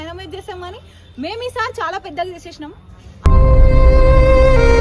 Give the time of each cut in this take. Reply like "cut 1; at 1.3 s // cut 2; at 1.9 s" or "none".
none